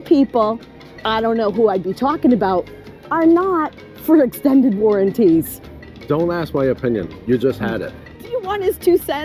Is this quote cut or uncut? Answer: cut